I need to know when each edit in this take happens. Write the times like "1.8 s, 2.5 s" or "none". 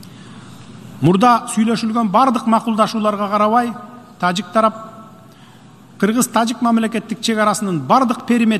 none